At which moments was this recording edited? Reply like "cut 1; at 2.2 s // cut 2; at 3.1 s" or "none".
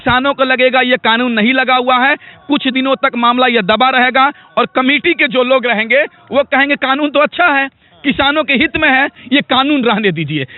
cut 1; at 9.2 s